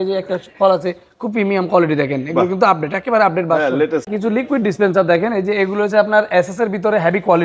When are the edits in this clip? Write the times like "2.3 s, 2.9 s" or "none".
4.1 s